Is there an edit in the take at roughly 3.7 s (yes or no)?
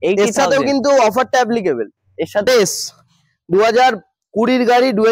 no